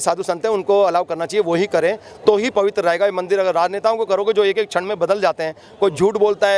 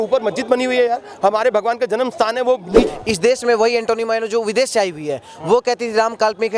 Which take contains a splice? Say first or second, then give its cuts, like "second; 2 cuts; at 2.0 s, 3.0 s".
second; 1 cut; at 2.9 s